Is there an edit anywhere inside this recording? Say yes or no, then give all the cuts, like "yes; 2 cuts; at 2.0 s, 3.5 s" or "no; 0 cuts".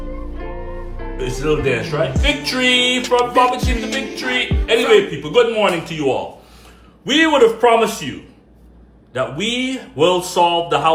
no; 0 cuts